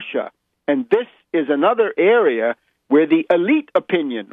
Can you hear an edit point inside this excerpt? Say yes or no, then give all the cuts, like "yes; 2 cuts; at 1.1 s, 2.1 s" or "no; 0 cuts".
no; 0 cuts